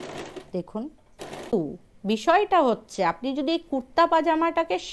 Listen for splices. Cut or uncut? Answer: cut